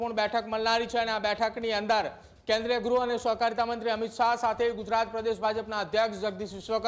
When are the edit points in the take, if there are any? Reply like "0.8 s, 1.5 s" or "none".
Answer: none